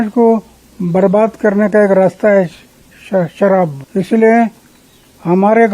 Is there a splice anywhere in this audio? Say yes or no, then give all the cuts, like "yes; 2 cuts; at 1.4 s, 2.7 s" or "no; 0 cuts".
yes; 1 cut; at 3.8 s